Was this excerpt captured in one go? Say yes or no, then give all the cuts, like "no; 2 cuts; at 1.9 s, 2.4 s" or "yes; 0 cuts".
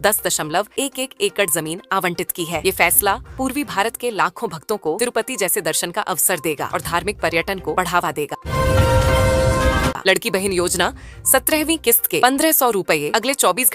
no; 2 cuts; at 8.4 s, 10.0 s